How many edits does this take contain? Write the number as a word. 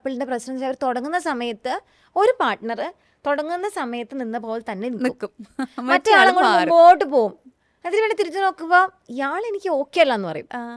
zero